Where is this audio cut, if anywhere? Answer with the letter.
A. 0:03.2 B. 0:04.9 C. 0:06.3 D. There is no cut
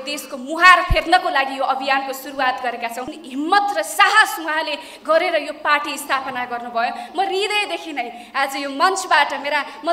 A